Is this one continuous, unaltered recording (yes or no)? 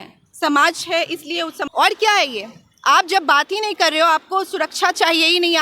no